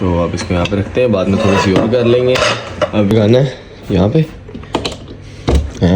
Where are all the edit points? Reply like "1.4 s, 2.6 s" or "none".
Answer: 3.1 s